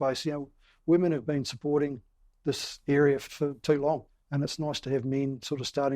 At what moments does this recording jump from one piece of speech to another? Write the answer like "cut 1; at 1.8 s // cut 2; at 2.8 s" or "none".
cut 1; at 3.3 s // cut 2; at 4.2 s